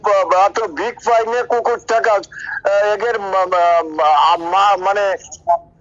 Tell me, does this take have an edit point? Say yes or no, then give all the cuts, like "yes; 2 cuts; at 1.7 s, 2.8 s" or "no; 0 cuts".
no; 0 cuts